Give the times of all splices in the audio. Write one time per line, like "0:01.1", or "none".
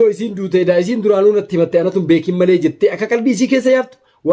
none